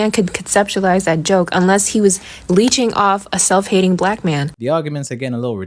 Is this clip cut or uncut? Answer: uncut